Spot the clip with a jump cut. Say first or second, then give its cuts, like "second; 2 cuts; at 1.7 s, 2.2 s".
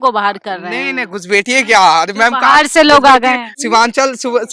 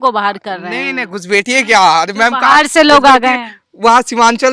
first; 1 cut; at 3.6 s